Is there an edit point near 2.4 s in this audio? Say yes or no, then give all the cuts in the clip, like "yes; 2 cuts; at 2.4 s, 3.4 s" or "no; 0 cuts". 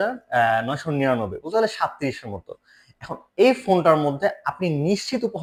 no; 0 cuts